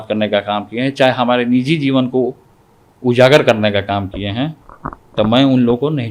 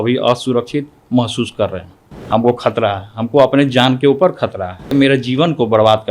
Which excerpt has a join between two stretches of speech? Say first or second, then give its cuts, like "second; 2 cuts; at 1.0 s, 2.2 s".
second; 2 cuts; at 2.1 s, 4.9 s